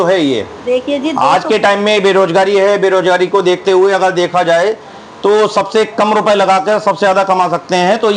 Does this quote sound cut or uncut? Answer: uncut